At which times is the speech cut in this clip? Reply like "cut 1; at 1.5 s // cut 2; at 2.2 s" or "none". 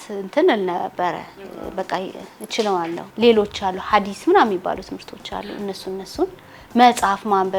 cut 1; at 3.0 s